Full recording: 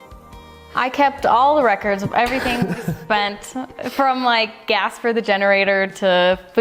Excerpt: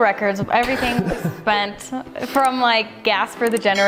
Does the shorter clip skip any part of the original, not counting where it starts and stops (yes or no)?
no